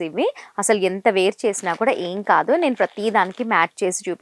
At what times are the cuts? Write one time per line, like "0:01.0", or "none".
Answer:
none